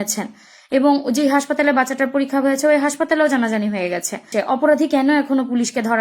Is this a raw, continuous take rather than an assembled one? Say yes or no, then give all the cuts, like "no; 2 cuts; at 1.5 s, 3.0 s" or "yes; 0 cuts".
no; 1 cut; at 4.3 s